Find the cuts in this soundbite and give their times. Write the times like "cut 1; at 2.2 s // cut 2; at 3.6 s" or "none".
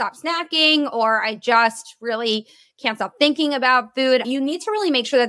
cut 1; at 4.3 s